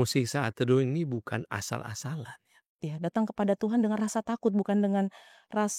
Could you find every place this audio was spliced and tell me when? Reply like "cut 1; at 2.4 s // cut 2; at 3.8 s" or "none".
cut 1; at 2.9 s